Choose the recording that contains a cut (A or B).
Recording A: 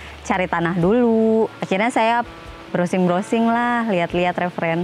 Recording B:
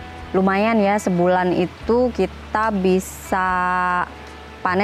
A